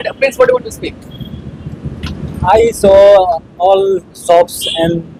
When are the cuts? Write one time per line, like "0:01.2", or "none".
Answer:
none